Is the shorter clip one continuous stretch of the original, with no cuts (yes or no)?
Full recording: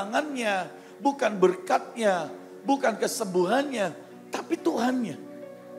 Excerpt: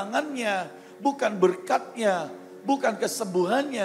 yes